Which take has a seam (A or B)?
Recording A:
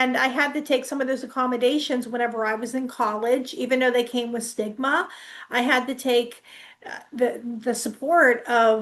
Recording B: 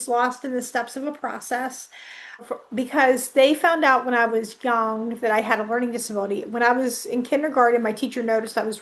B